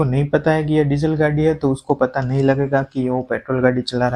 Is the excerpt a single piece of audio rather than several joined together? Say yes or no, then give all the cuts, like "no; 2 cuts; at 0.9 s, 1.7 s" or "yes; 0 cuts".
yes; 0 cuts